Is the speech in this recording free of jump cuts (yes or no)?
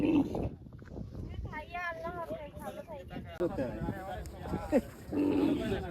no